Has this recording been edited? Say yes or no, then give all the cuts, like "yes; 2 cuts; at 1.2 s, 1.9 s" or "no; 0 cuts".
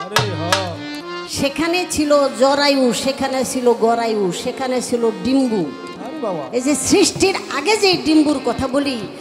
no; 0 cuts